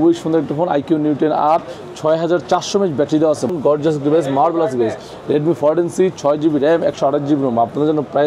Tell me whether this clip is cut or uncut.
cut